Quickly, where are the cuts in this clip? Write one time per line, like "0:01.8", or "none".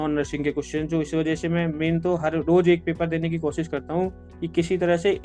none